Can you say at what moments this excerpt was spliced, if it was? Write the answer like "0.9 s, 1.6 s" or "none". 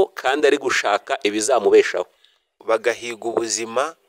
2.6 s